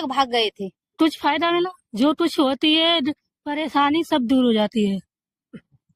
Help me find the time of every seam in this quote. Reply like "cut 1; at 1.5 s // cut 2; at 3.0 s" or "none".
cut 1; at 0.9 s